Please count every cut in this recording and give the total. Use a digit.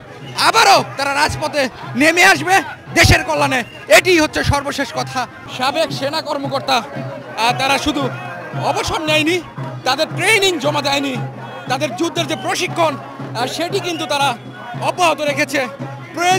1